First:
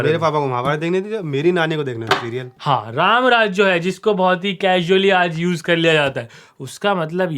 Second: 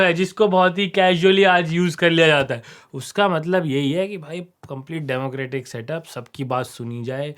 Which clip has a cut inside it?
first; 1 cut; at 2.5 s

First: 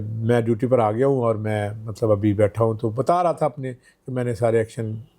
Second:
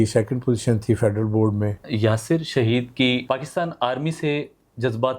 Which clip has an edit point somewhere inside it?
second; 2 cuts; at 1.8 s, 3.2 s

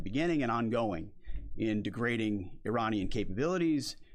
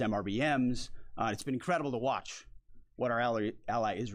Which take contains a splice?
second; 1 cut; at 3.1 s

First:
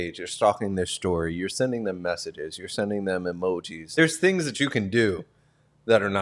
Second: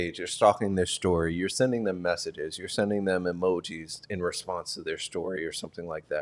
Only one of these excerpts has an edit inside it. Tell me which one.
first; 1 cut; at 4.0 s

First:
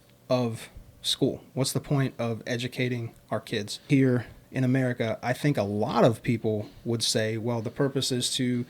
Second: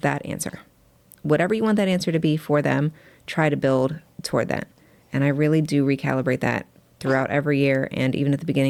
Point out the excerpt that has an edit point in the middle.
first; 1 cut; at 3.9 s

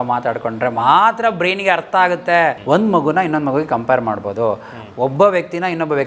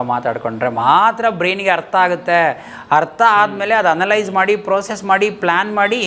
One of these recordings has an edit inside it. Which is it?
first; 1 cut; at 2.6 s

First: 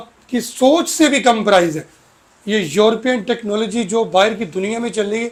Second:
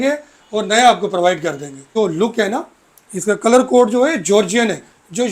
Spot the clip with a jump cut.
second; 1 cut; at 1.9 s

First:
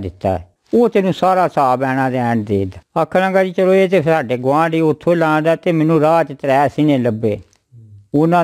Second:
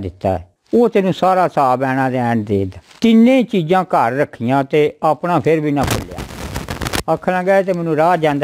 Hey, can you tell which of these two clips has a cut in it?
second; 1 cut; at 2.8 s

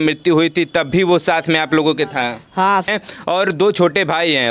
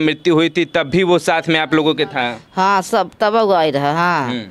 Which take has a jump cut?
first; 1 cut; at 2.9 s

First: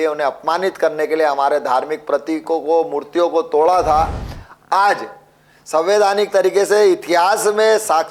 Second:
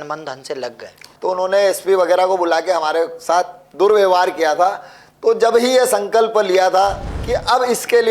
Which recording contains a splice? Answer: second; 2 cuts; at 1.1 s, 7.1 s

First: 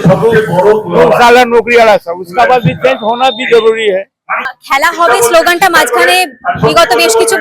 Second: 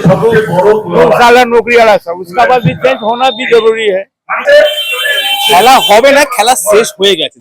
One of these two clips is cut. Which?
second; 1 cut; at 4.4 s

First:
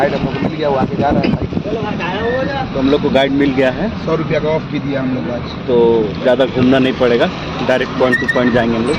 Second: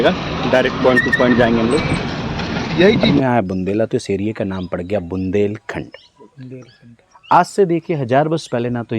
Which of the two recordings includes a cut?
second; 1 cut; at 3.1 s

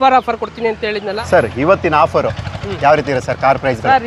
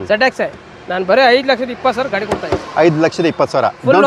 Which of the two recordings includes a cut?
first; 1 cut; at 1.2 s

